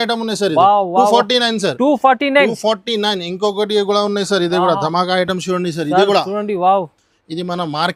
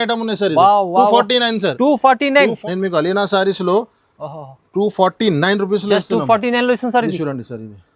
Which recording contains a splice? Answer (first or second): second